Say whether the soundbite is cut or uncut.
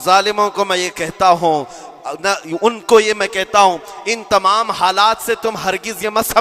uncut